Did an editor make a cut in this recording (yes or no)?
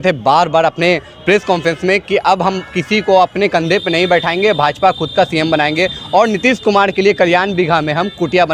no